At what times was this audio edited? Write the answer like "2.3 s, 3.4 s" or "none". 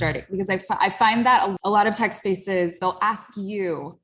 1.5 s, 2.8 s